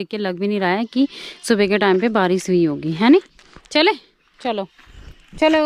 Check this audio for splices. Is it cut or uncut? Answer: uncut